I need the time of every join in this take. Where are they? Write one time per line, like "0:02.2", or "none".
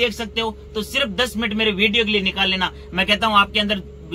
none